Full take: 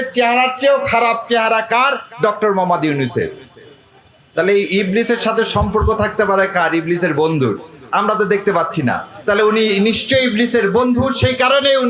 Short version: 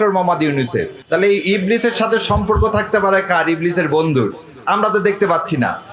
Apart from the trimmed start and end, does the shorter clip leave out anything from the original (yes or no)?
yes